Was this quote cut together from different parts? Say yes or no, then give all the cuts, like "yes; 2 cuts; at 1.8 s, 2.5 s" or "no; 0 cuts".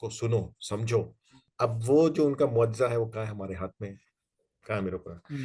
yes; 1 cut; at 1.5 s